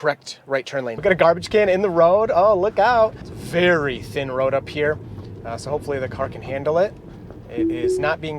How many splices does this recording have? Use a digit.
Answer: 2